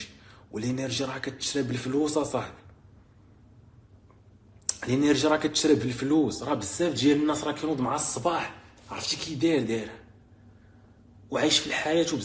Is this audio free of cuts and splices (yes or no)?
yes